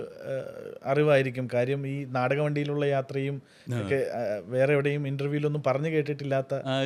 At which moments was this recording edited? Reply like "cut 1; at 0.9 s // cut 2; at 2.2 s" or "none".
none

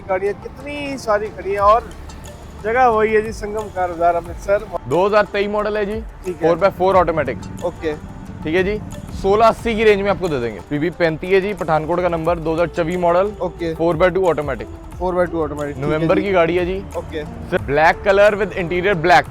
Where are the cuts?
cut 1; at 4.7 s // cut 2; at 10.6 s // cut 3; at 17.6 s

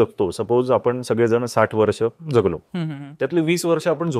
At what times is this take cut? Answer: cut 1; at 3.0 s

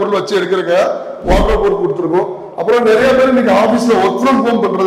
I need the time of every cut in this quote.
none

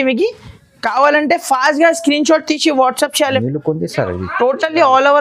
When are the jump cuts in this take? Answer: cut 1; at 3.4 s

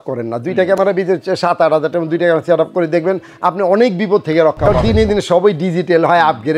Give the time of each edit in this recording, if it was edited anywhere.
cut 1; at 4.7 s

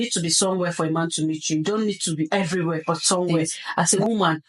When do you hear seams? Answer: cut 1; at 3.3 s

